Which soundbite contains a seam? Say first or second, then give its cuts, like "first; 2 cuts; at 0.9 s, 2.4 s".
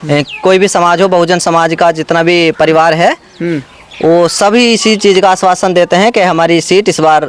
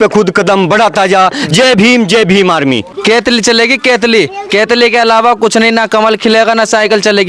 second; 1 cut; at 2.9 s